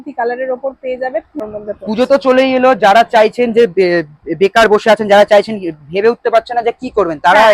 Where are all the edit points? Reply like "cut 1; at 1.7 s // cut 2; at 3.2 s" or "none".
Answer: cut 1; at 1.4 s